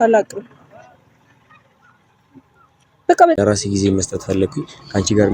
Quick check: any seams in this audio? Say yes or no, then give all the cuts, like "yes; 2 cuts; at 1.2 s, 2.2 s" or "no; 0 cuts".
yes; 1 cut; at 3.4 s